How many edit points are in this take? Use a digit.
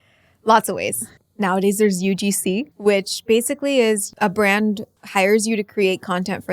4